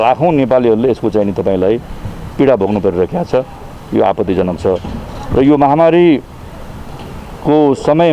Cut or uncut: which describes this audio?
uncut